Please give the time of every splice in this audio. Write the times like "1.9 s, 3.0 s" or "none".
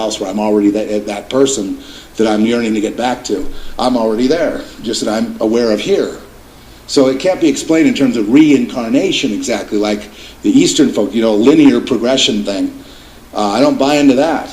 2.6 s